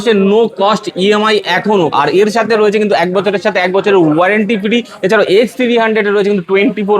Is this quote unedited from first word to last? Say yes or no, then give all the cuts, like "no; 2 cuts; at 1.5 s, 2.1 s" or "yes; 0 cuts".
yes; 0 cuts